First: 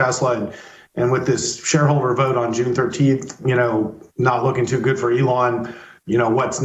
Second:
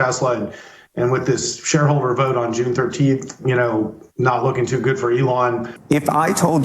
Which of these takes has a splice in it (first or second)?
second